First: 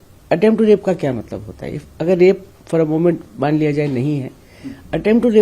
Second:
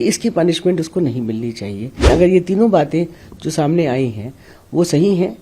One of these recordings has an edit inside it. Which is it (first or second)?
second